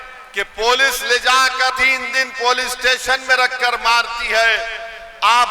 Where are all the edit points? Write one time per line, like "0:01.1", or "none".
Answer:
0:01.8